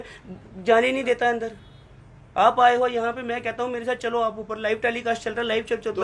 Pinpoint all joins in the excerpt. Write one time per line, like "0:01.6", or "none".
none